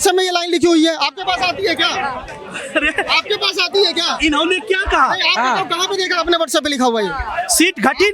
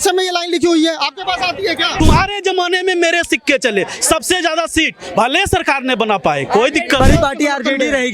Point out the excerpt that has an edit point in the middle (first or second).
second